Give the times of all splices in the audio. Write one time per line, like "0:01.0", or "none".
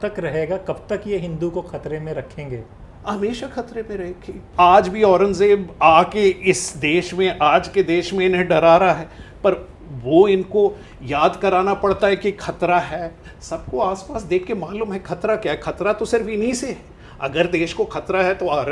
0:04.4